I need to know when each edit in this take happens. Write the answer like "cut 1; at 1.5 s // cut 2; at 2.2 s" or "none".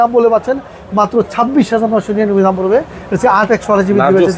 none